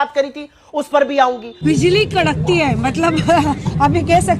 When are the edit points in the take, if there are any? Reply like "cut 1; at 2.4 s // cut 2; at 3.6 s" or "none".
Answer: cut 1; at 1.6 s